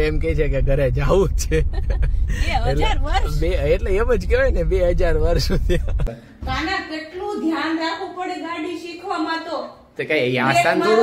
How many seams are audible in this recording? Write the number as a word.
one